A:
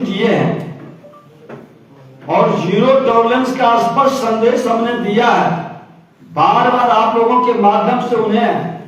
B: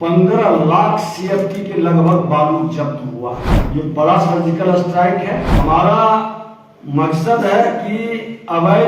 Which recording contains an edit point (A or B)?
B